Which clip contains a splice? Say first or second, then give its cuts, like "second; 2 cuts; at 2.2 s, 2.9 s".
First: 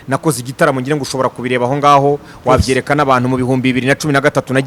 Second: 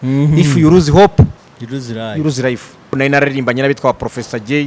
second; 1 cut; at 3.0 s